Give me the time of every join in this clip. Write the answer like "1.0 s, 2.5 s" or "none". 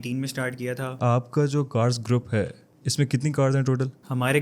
1.0 s